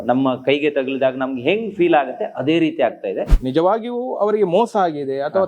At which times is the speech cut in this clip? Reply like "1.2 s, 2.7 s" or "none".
3.3 s